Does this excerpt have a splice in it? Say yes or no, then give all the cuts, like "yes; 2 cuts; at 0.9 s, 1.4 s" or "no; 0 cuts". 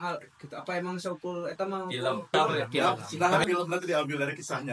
yes; 1 cut; at 2.3 s